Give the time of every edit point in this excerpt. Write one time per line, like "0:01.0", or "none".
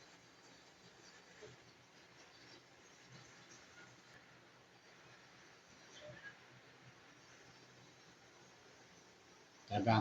0:04.1